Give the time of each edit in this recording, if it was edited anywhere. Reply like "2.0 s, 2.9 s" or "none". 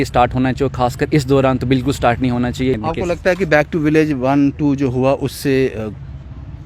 2.8 s